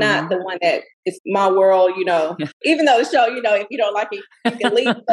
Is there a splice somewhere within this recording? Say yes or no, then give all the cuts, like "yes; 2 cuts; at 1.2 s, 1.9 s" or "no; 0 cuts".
yes; 2 cuts; at 1.0 s, 2.6 s